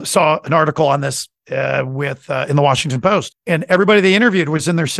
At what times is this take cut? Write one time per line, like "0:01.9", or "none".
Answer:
0:01.3

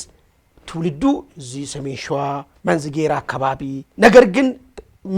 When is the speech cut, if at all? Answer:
0:02.5
0:03.9

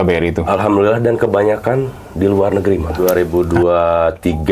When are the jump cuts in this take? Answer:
0:02.9

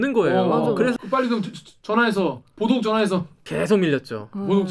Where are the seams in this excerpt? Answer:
0:00.9

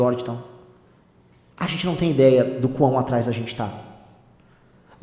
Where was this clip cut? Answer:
none

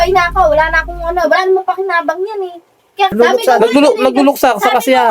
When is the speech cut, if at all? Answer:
0:03.1

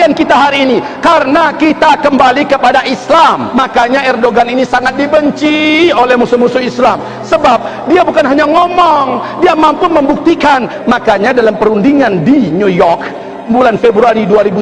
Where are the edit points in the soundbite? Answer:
0:03.4
0:10.7

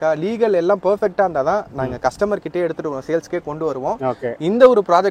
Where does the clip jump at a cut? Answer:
none

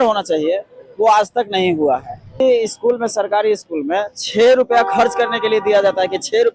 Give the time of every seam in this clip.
0:02.4

